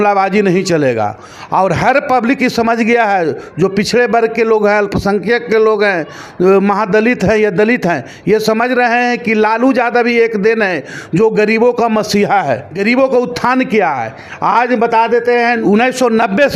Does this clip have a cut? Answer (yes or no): no